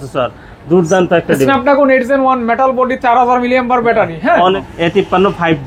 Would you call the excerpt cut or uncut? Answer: cut